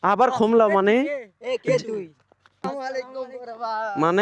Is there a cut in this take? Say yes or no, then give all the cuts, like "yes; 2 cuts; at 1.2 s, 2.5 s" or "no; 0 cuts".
yes; 1 cut; at 2.6 s